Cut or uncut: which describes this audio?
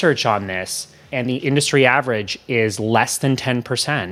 cut